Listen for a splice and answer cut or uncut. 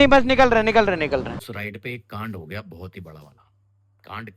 cut